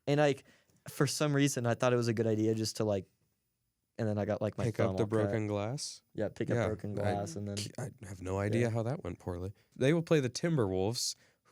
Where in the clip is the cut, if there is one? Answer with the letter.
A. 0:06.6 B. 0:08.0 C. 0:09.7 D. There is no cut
C